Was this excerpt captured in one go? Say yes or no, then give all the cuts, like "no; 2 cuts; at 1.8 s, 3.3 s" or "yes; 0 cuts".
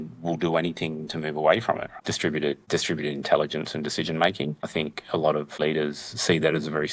no; 2 cuts; at 1.9 s, 5.6 s